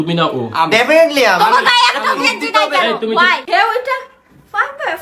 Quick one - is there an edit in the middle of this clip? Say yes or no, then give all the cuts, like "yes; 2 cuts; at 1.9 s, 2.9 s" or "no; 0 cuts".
yes; 1 cut; at 3.4 s